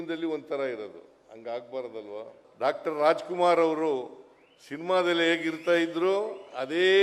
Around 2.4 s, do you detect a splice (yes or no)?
yes